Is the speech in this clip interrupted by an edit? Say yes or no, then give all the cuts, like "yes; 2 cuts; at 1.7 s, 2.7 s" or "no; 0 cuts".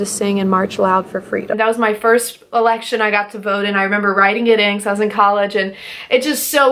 yes; 1 cut; at 1.6 s